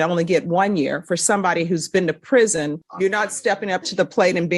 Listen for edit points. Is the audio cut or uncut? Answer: cut